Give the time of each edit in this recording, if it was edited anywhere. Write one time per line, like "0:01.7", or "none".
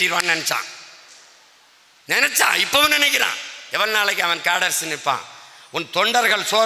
none